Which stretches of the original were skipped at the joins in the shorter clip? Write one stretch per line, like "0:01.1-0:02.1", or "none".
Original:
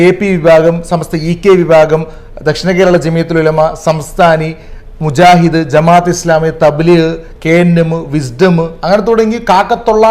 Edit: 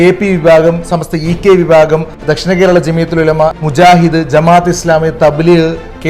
0:02.2-0:02.3
0:03.8-0:05.0